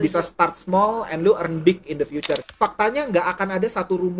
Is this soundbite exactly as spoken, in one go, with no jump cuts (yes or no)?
no